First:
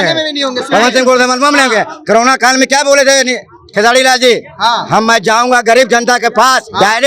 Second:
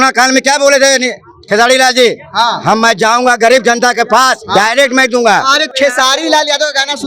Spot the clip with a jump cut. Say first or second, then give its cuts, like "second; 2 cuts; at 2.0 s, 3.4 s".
second; 1 cut; at 5.7 s